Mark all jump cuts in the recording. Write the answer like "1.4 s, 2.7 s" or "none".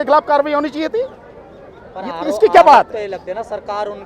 none